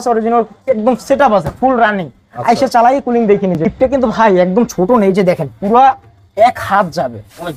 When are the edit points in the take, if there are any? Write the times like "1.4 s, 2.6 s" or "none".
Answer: 3.7 s